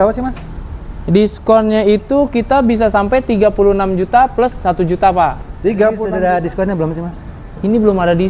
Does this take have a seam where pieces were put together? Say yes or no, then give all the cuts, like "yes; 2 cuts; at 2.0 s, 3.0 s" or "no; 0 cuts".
yes; 1 cut; at 6.1 s